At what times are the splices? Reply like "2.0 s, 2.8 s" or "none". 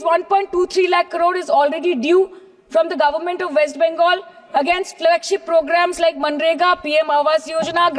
none